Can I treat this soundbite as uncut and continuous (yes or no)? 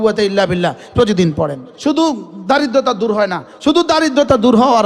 no